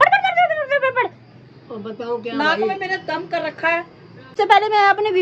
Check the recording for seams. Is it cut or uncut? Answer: cut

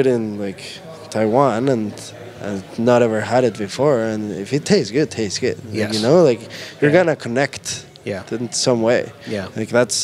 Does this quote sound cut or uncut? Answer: uncut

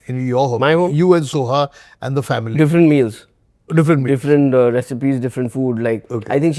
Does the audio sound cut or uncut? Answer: uncut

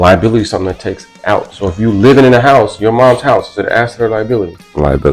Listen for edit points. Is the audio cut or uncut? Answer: uncut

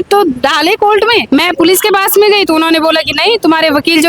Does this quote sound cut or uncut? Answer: cut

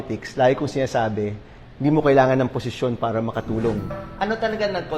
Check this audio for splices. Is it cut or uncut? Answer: cut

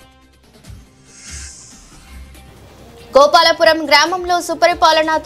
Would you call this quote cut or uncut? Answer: uncut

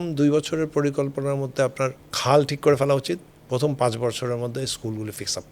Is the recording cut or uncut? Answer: cut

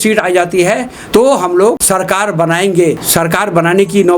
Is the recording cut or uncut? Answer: cut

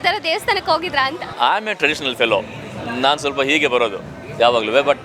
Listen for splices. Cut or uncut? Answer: cut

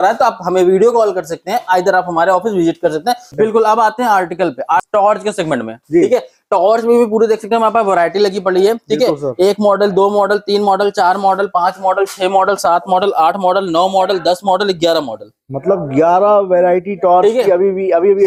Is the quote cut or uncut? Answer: uncut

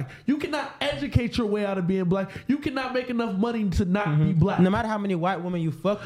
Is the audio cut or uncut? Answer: uncut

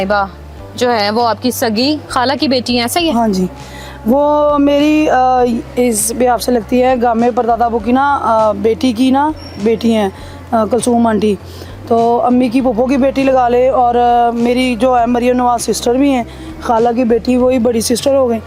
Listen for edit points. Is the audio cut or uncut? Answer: uncut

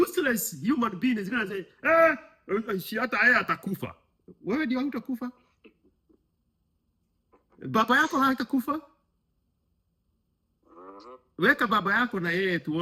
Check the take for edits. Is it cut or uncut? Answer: uncut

